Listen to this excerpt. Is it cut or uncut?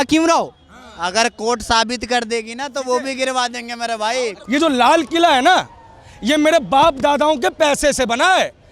cut